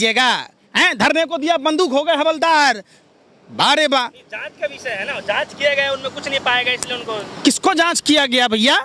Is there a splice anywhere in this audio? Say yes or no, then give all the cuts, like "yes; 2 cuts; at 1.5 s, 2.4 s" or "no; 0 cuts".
no; 0 cuts